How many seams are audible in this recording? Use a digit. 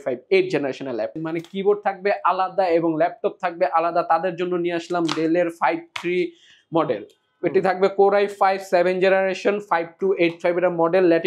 1